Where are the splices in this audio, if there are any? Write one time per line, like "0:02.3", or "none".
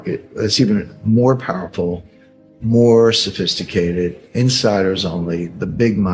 none